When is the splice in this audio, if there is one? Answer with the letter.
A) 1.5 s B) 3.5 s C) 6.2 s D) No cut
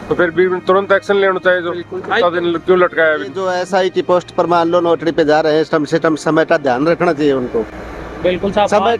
B